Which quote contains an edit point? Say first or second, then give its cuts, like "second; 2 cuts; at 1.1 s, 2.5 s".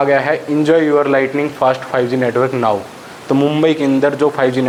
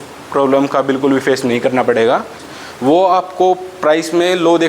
second; 1 cut; at 2.5 s